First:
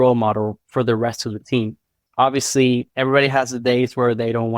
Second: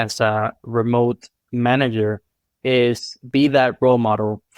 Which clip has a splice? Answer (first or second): first